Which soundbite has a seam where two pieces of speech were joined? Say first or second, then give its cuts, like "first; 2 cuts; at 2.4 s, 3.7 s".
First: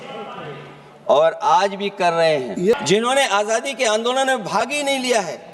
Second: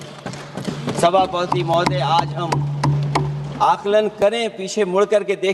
first; 1 cut; at 2.7 s